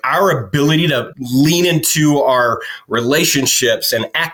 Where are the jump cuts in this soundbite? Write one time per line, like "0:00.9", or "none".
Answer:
none